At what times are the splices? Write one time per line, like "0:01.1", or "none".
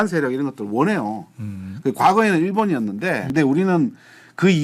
0:03.3